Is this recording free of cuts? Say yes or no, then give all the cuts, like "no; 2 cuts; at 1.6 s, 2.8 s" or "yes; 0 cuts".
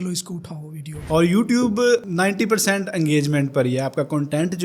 no; 1 cut; at 1.0 s